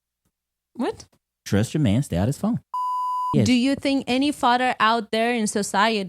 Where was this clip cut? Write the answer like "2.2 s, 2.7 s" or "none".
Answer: 2.9 s

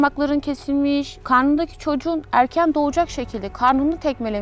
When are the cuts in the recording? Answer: 1.1 s

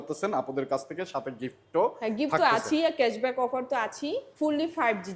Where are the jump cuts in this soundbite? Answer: 4.3 s

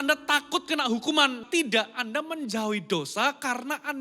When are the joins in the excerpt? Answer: 1.4 s

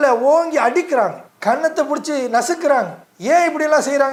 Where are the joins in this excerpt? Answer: none

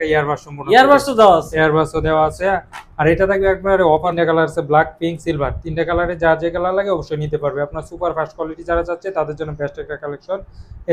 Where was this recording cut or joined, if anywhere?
4.1 s

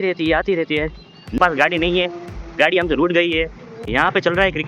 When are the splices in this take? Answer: 1.4 s, 3.8 s

